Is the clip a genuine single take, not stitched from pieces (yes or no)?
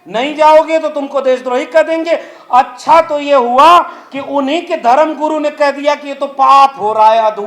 yes